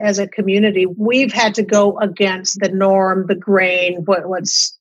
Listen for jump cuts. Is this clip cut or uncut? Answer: cut